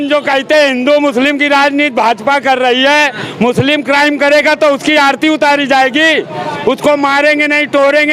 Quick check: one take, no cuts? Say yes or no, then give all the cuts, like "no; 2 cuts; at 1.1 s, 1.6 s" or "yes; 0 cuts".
yes; 0 cuts